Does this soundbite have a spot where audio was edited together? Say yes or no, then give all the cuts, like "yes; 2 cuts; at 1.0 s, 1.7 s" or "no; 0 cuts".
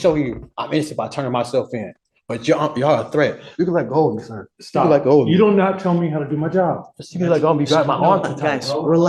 no; 0 cuts